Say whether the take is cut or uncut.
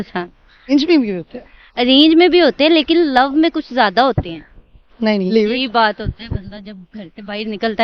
cut